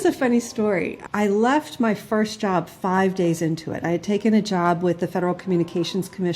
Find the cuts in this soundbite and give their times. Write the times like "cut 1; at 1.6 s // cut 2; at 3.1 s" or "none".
cut 1; at 1.0 s